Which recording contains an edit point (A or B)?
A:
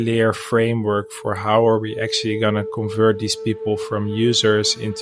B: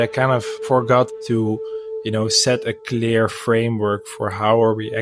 B